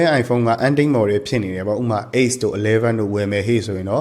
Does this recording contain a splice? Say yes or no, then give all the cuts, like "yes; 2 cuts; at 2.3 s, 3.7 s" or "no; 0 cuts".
no; 0 cuts